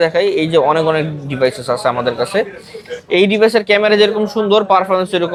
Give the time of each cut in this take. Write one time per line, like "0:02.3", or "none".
none